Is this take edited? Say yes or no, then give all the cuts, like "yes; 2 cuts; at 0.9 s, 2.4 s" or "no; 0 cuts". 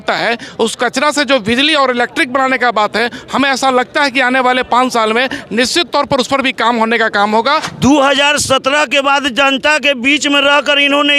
yes; 1 cut; at 7.7 s